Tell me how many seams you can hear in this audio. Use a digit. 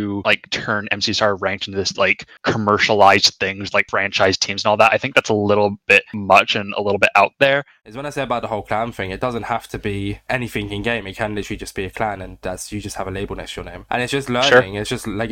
1